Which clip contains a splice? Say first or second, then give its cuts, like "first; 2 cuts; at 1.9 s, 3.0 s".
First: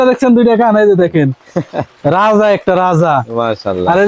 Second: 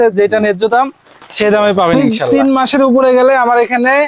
second; 1 cut; at 2.1 s